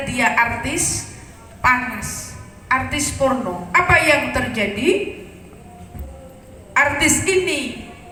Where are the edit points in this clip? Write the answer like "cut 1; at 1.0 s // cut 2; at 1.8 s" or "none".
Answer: none